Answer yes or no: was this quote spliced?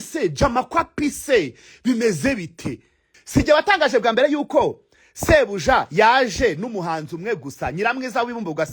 yes